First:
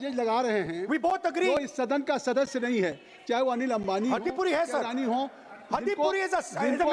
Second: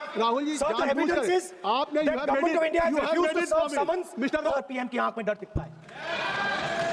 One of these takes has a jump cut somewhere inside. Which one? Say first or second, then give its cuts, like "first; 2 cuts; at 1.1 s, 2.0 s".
second; 1 cut; at 4.5 s